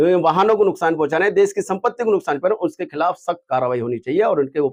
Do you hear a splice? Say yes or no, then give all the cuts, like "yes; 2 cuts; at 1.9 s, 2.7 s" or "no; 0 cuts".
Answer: no; 0 cuts